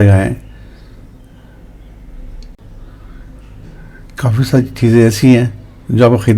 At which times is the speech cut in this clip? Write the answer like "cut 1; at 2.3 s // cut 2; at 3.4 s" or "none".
cut 1; at 2.6 s

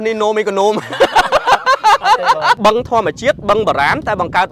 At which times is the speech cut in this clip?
cut 1; at 2.6 s

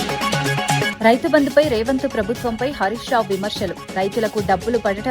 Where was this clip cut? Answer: cut 1; at 0.9 s

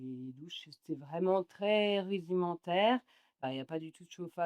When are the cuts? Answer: cut 1; at 3.5 s

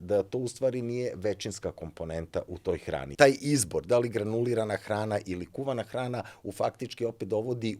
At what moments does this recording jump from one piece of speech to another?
cut 1; at 3.1 s

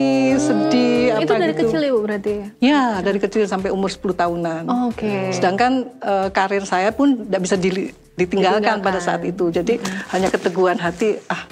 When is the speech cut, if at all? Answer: none

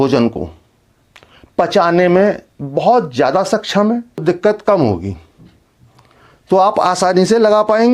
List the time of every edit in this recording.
cut 1; at 4.2 s

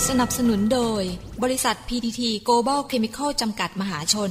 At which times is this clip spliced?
none

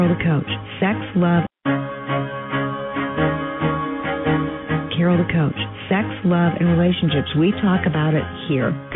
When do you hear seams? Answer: cut 1; at 1.5 s

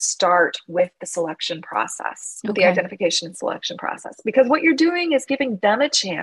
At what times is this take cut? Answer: none

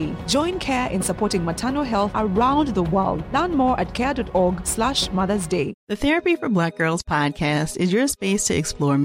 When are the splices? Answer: none

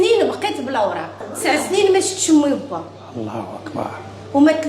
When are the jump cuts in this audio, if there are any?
cut 1; at 1.1 s

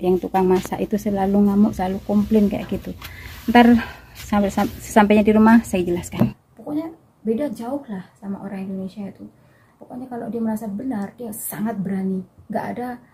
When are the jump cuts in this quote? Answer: cut 1; at 6.3 s

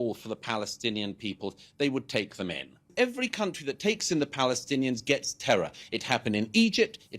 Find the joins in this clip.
cut 1; at 2.9 s

